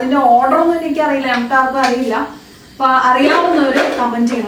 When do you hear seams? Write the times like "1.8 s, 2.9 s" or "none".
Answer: none